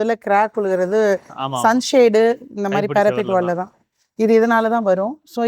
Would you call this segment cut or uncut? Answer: uncut